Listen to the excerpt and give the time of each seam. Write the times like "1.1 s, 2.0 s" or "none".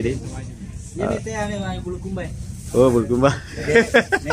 none

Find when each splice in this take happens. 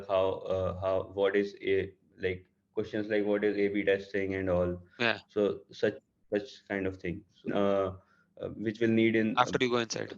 7.5 s

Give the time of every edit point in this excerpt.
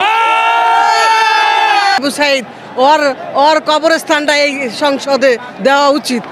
2.0 s

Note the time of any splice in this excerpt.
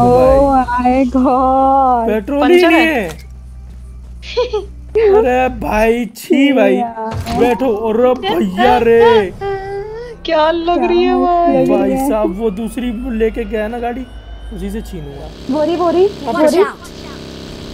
none

